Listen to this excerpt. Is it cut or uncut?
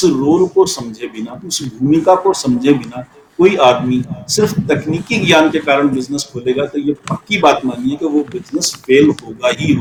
uncut